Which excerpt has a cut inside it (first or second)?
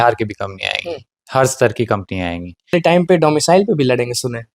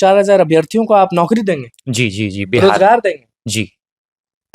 first